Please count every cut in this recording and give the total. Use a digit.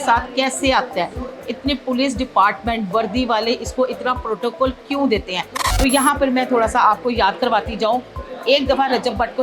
0